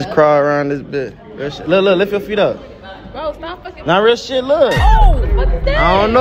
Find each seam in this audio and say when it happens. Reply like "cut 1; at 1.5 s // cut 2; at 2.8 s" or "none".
none